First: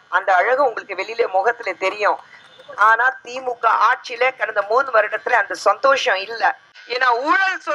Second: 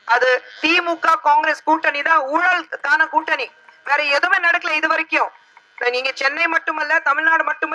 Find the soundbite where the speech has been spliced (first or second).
first